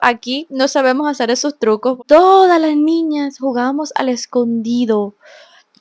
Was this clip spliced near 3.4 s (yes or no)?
no